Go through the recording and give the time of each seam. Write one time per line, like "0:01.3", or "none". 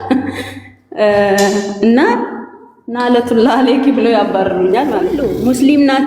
0:05.1